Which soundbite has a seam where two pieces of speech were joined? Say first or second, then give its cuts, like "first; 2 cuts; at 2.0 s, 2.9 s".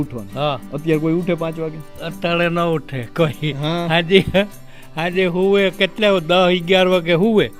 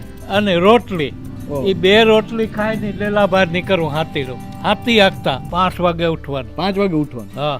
second; 1 cut; at 5.4 s